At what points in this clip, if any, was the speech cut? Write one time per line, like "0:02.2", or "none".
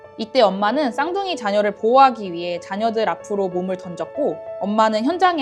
0:04.5